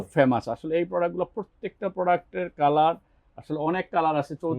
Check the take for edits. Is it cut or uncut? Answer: uncut